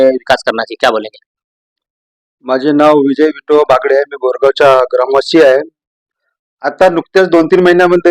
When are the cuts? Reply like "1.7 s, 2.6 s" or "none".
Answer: none